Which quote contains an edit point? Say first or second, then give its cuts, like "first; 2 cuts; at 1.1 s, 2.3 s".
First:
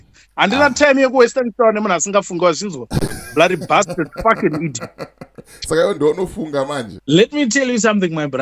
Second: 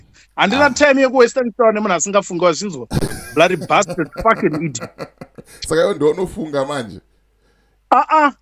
first; 1 cut; at 6.9 s